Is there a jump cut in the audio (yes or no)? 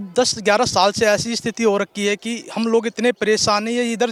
no